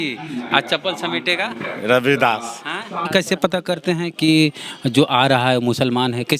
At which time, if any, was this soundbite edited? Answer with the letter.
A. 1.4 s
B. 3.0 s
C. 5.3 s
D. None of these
B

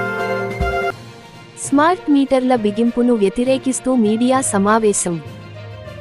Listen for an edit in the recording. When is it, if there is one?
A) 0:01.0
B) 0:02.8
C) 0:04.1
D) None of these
A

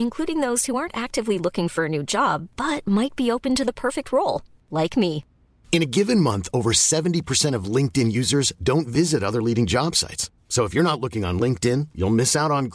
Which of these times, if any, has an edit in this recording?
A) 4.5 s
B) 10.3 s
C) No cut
C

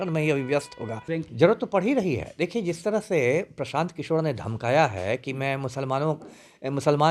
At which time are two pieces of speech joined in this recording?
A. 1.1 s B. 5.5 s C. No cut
A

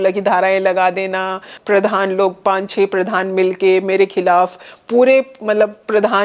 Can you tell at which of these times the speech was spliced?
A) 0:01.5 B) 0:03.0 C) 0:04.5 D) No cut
A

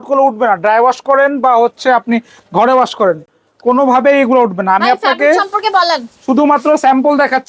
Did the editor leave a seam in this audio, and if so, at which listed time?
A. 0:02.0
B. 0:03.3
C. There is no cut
C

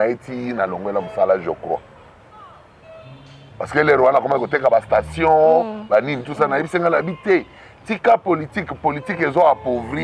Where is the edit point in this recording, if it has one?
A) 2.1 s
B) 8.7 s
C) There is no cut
C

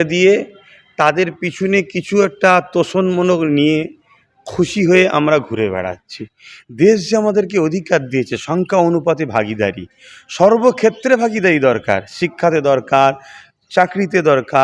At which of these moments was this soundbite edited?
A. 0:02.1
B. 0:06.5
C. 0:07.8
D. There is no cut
D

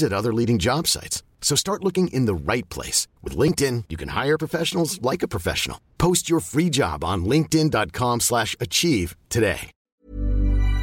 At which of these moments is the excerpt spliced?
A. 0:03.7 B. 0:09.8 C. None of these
B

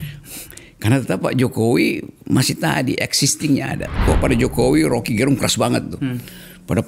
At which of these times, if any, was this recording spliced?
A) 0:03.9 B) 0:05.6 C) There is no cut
A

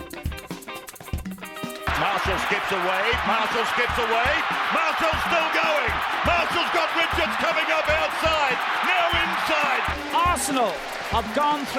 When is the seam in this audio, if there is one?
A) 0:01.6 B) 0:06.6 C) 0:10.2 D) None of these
A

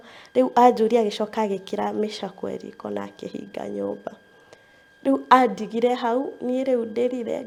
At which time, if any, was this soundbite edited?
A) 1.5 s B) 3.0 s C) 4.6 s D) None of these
D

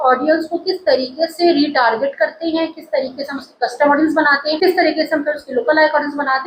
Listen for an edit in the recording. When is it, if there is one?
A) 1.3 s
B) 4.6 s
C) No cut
C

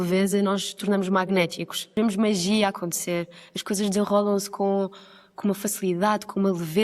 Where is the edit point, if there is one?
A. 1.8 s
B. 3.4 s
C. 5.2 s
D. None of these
A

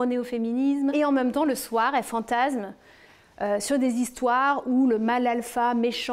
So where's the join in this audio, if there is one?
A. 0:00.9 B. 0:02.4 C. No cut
A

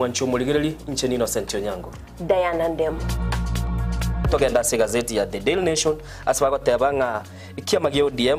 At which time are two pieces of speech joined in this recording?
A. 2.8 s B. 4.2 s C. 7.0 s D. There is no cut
D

